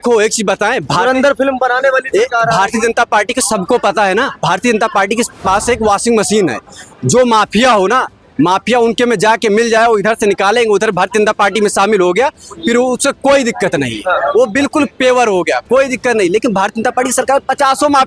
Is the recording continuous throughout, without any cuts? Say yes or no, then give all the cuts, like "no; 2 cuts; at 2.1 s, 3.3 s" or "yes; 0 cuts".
yes; 0 cuts